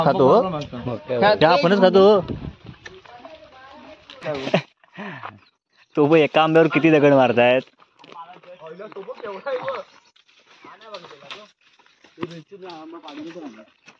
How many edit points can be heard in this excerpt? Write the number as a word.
one